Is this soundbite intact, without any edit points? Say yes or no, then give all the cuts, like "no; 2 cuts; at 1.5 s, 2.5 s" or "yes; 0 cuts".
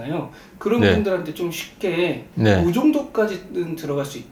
no; 1 cut; at 2.2 s